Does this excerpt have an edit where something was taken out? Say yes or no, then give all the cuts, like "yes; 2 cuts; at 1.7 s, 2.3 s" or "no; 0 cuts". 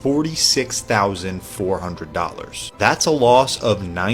no; 0 cuts